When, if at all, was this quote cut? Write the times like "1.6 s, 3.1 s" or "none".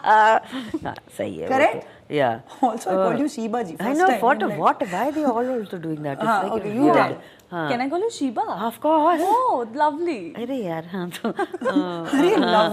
none